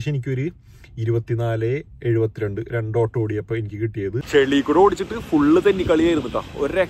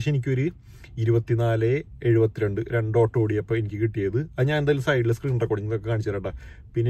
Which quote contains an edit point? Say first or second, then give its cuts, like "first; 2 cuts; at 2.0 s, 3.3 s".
first; 1 cut; at 4.2 s